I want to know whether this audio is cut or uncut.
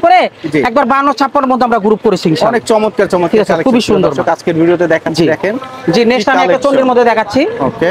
uncut